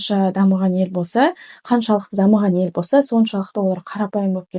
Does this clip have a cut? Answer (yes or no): no